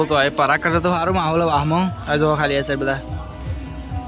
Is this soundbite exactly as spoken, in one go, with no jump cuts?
yes; 0 cuts

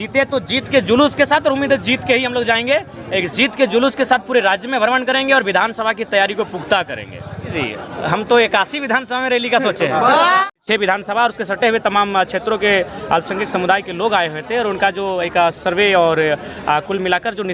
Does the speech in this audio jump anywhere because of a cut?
yes; 1 cut; at 10.5 s

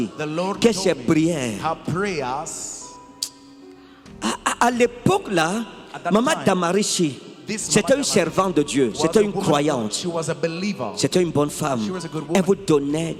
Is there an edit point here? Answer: no; 0 cuts

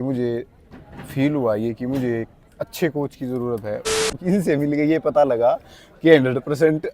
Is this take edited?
yes; 1 cut; at 4.1 s

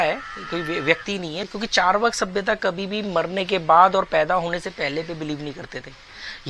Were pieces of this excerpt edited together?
yes; 1 cut; at 1.4 s

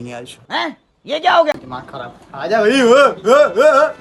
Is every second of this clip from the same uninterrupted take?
no; 1 cut; at 1.7 s

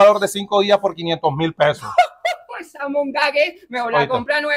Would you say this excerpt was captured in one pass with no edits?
yes; 0 cuts

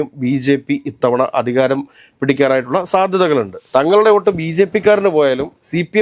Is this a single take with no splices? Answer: no; 1 cut; at 3.6 s

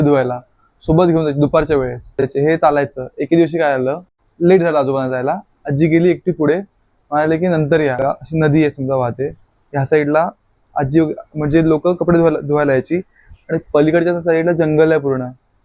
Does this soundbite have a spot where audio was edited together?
yes; 3 cuts; at 2.2 s, 4.2 s, 8.0 s

